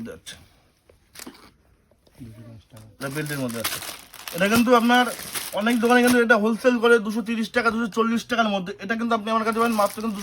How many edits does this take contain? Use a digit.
0